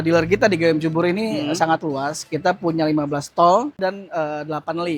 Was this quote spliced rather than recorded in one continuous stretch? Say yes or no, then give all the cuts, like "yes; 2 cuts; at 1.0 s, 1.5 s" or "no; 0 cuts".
yes; 1 cut; at 3.8 s